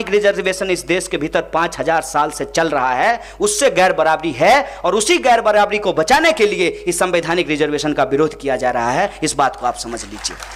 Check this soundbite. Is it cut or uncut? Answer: uncut